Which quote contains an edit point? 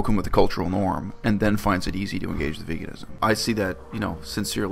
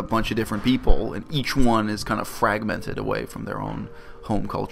first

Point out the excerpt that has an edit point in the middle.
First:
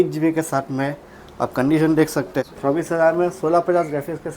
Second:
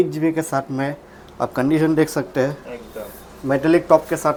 first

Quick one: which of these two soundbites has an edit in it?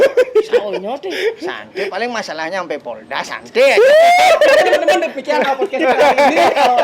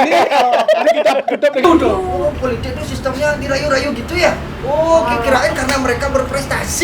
second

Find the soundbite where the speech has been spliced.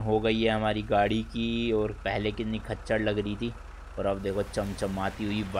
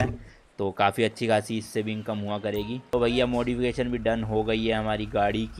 second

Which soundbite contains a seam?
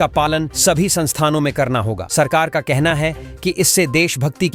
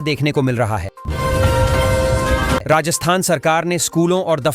second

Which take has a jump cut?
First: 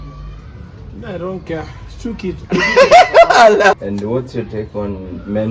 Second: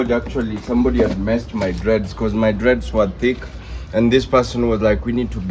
first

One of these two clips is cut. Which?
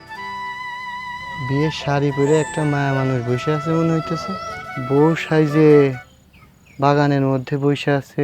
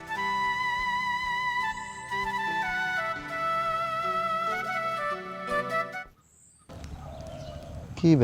first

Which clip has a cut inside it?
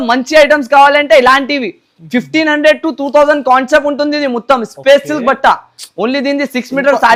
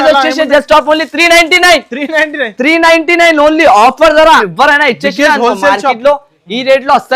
second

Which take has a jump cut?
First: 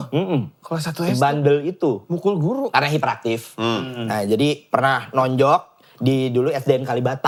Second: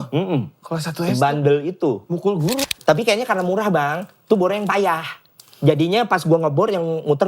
second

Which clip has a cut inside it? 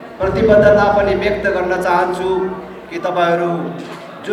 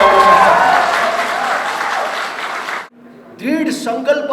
second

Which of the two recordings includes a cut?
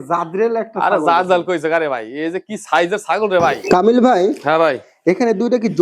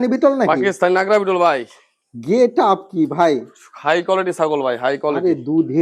first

